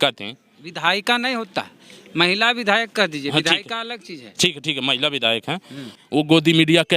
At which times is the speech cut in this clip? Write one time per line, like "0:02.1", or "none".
0:05.9